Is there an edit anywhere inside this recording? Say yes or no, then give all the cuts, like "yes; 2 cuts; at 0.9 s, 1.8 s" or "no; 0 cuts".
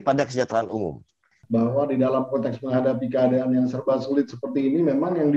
yes; 1 cut; at 1.4 s